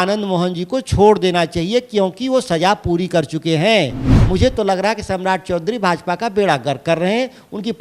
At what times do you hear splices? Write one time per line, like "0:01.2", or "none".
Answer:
0:04.2